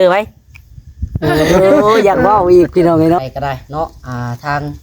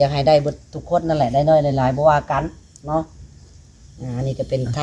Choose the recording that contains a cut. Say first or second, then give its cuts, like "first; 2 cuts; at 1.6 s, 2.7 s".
first; 1 cut; at 3.2 s